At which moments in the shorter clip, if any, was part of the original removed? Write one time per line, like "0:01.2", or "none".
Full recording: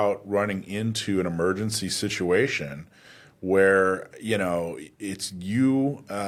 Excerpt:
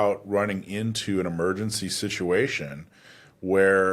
none